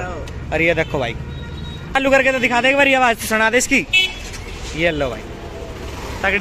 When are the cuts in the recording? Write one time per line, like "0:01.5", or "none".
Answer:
0:02.0